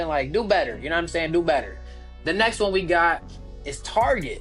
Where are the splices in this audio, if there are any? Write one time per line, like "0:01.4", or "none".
none